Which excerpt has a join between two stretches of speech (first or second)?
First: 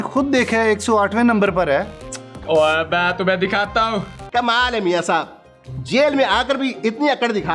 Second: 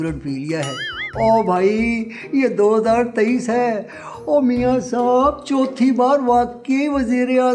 first